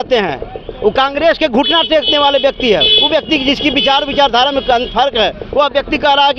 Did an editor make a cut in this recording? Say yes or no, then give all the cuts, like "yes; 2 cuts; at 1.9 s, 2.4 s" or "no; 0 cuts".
no; 0 cuts